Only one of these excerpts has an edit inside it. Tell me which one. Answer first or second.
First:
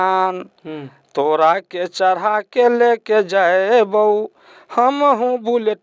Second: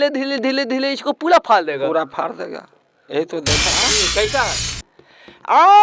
second